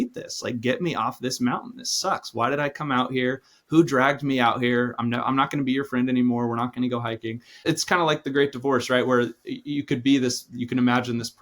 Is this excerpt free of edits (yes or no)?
no